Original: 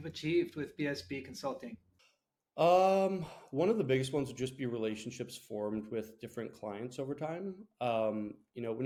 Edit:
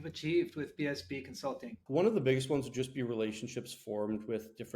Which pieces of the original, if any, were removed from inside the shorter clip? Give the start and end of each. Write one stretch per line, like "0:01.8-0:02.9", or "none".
0:01.7-0:03.4